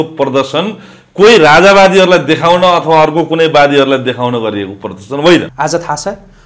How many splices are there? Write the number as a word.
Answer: one